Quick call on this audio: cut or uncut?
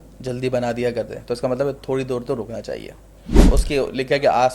cut